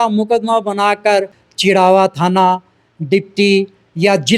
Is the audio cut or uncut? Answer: cut